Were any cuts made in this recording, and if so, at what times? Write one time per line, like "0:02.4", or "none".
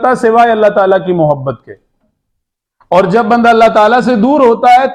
none